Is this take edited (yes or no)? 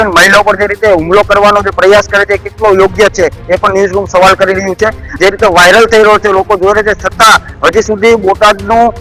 yes